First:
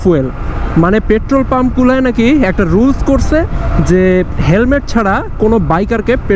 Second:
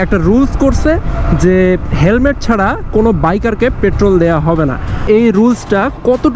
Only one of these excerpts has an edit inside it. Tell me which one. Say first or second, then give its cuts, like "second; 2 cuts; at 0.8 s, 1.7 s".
second; 1 cut; at 5.0 s